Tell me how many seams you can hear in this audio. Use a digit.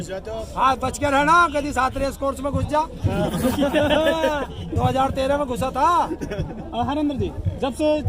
0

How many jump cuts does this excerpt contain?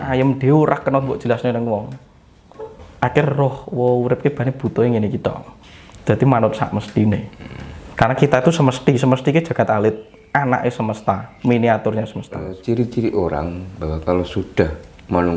1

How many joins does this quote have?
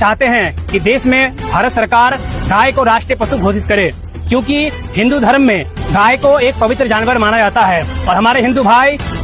0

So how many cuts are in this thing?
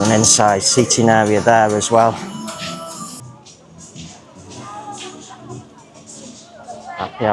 1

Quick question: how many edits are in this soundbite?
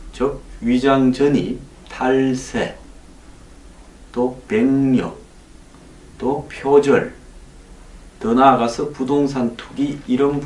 1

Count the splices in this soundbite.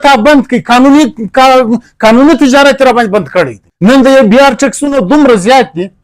1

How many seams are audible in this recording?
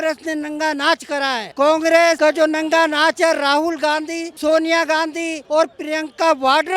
4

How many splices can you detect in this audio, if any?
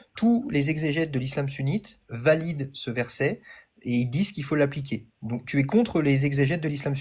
0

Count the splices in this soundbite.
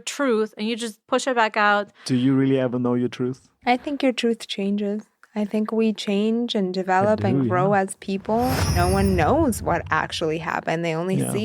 3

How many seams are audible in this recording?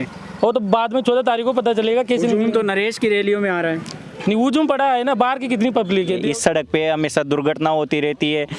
1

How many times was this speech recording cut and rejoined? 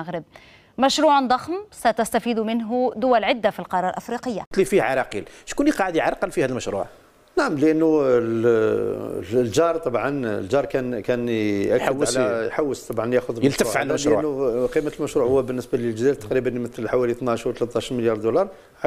1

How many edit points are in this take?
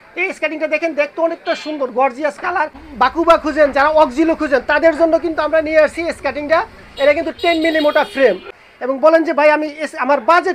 2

